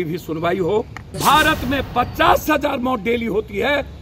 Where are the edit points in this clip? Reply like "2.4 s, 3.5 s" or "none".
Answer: 1.0 s